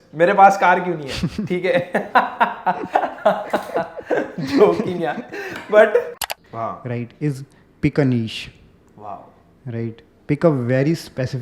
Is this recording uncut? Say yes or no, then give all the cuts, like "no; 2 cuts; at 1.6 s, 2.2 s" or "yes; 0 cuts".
no; 1 cut; at 6.3 s